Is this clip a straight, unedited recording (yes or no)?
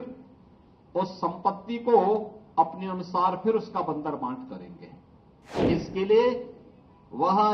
no